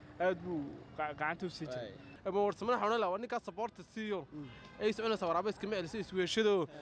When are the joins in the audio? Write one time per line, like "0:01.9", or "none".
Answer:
0:02.1